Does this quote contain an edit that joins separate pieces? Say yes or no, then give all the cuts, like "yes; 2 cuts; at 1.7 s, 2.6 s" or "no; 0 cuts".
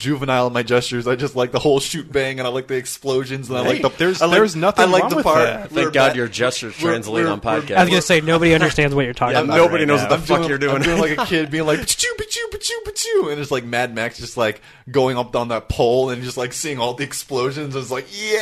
no; 0 cuts